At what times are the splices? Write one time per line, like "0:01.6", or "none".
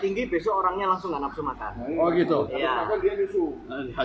none